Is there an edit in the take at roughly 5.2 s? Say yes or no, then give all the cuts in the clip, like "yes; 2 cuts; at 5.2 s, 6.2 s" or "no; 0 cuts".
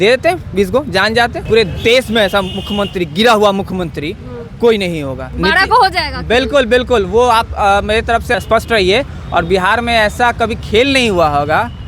yes; 3 cuts; at 1.4 s, 5.2 s, 8.3 s